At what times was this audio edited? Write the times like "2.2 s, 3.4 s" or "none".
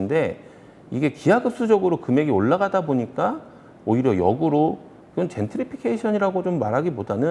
none